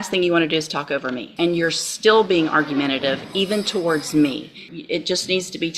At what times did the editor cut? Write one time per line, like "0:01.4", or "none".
0:01.3
0:04.7